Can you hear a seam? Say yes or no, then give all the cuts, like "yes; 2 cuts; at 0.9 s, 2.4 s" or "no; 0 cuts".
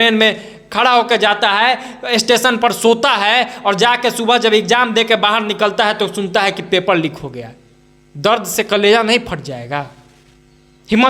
no; 0 cuts